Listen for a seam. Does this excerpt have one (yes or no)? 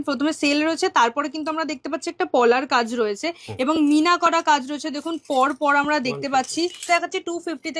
yes